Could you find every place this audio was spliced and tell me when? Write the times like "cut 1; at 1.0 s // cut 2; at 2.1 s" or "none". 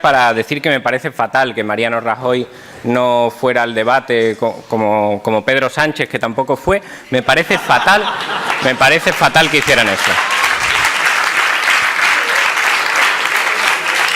cut 1; at 12.3 s